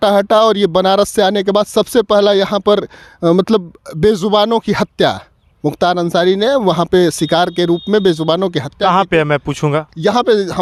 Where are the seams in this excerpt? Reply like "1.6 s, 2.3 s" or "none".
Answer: none